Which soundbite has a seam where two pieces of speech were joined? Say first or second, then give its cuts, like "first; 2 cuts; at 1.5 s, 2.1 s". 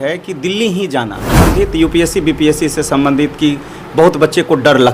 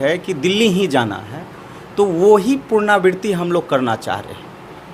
first; 1 cut; at 1.5 s